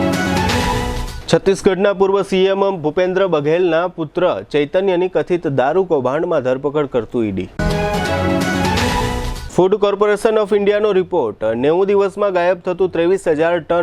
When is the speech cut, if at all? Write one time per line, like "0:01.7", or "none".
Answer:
0:01.0